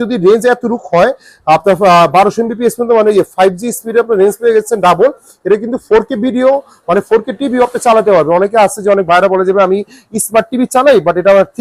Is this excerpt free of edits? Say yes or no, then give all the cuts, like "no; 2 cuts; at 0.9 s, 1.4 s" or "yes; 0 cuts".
yes; 0 cuts